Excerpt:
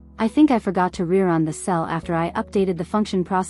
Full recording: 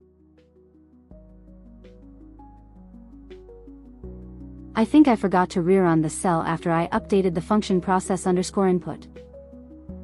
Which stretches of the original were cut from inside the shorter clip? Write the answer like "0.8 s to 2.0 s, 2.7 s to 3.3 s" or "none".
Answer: none